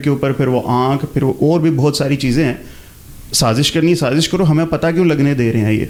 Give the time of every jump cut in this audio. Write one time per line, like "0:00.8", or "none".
none